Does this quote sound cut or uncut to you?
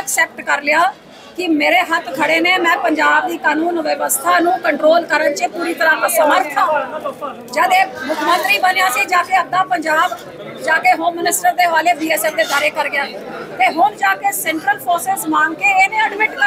uncut